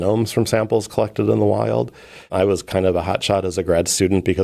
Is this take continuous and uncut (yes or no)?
yes